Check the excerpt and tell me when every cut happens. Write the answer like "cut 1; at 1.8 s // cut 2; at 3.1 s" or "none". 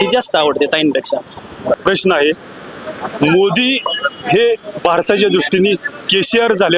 cut 1; at 1.8 s